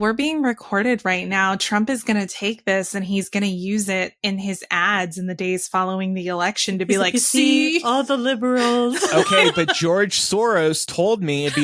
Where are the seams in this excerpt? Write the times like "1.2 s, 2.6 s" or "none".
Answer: none